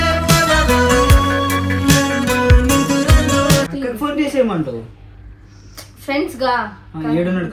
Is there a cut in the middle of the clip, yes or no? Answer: yes